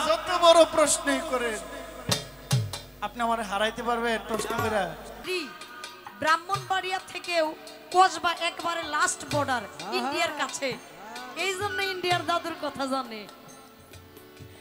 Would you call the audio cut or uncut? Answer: cut